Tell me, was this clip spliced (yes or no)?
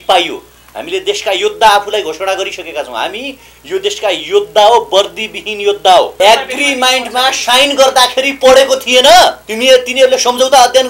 yes